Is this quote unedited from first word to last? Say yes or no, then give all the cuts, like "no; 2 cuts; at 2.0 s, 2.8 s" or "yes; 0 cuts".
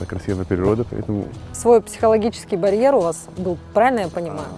no; 1 cut; at 1.4 s